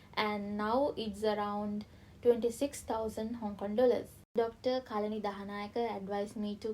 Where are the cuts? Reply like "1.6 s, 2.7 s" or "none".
4.2 s